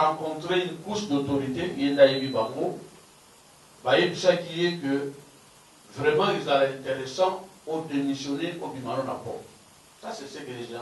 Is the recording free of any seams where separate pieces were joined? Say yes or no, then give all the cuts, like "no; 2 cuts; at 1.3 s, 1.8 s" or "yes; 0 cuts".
yes; 0 cuts